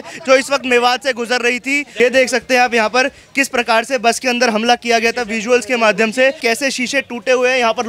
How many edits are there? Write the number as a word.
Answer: two